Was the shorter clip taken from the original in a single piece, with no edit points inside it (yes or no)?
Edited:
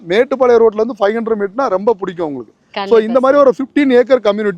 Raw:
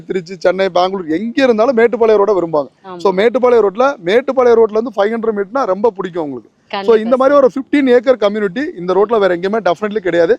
yes